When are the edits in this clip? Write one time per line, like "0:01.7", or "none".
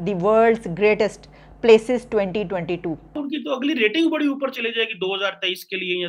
0:03.1

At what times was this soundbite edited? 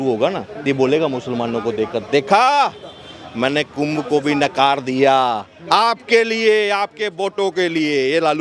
none

